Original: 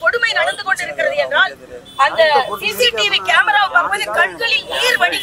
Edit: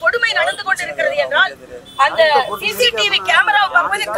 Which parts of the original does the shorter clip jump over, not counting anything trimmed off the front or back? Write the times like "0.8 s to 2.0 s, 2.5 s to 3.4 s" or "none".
none